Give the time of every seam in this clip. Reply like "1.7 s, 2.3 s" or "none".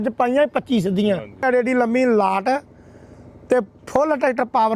1.4 s